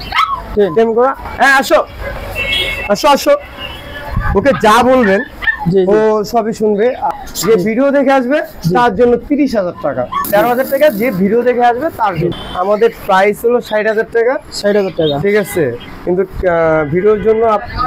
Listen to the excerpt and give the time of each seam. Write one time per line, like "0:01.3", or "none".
0:07.1
0:10.1
0:12.3